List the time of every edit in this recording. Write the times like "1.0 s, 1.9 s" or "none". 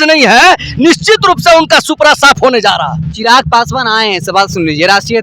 none